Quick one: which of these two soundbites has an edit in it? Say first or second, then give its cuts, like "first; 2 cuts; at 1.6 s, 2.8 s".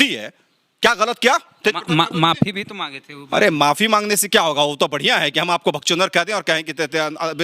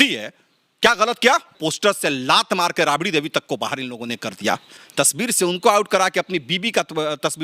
second; 2 cuts; at 1.6 s, 4.7 s